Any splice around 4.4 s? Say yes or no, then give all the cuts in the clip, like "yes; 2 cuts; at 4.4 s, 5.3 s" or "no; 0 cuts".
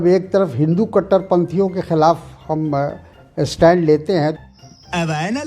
yes; 1 cut; at 4.4 s